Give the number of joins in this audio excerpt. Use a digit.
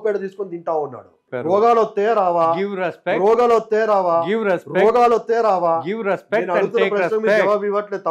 1